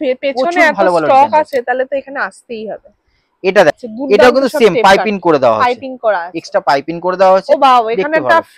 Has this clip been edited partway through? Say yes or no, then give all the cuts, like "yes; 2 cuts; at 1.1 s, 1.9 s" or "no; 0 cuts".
yes; 1 cut; at 3.8 s